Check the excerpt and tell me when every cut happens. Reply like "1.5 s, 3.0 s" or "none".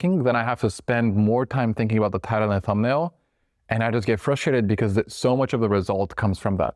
none